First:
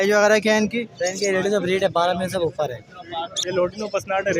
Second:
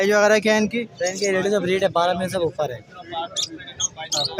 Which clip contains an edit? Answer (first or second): first